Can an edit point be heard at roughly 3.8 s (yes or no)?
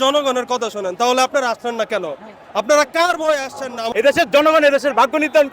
yes